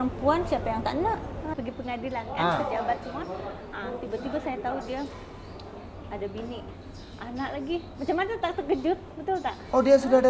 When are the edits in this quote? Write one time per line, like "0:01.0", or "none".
0:01.4